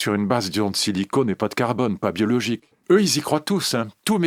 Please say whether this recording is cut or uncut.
cut